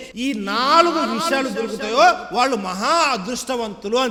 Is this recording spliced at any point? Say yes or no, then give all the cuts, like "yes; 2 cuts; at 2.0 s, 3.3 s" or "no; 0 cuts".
no; 0 cuts